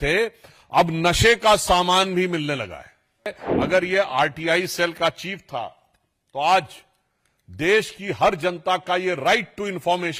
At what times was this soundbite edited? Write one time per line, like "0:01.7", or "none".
0:03.4